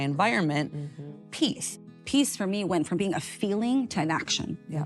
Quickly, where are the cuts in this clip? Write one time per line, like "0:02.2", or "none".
0:01.8

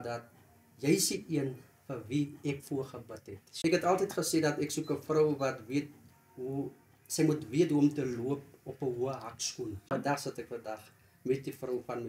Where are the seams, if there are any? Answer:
0:03.5
0:09.9

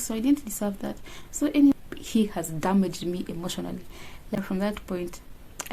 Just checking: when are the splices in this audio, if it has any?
0:01.7
0:04.3

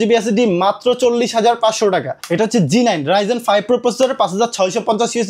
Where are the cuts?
0:02.2

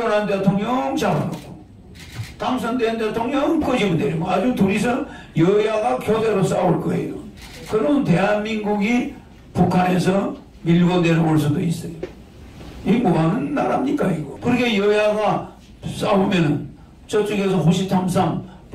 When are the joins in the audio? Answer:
none

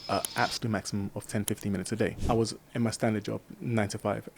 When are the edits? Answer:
0:02.2

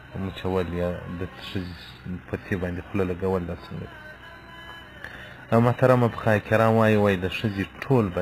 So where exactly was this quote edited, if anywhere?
0:06.2

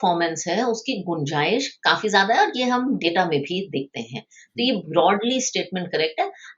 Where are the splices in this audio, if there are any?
none

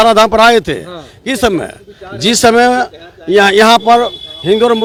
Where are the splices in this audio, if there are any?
none

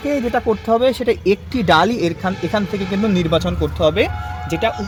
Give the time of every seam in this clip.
none

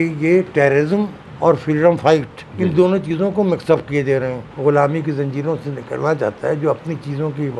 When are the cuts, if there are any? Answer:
0:01.2
0:02.4
0:04.4

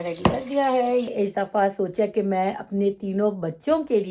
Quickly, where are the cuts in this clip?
0:01.1

